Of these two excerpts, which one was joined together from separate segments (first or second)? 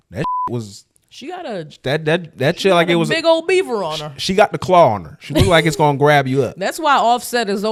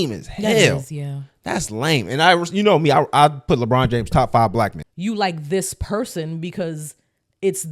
second